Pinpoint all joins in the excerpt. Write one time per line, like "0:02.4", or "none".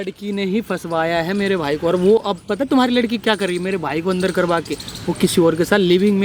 none